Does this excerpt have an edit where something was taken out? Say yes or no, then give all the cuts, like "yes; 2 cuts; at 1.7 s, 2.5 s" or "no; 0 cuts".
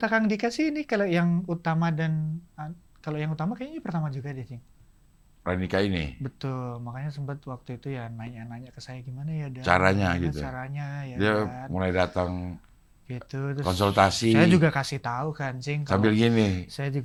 no; 0 cuts